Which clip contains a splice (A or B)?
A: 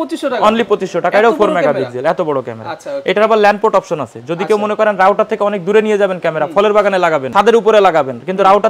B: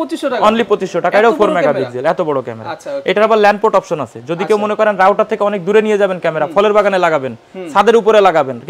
A